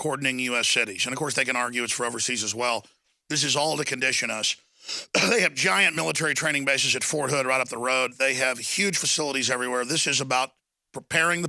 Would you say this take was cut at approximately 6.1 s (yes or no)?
no